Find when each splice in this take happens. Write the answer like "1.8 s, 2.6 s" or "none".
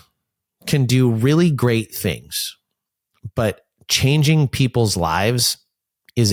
none

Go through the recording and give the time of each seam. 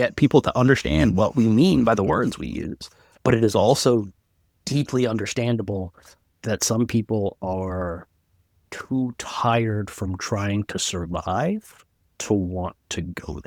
none

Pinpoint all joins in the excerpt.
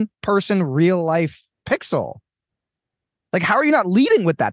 1.5 s

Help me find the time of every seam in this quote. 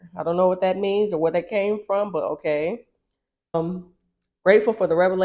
3.5 s

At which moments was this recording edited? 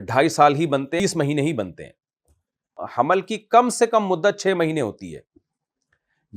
1.0 s, 2.8 s

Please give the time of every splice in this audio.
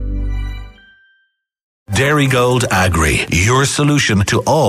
1.8 s

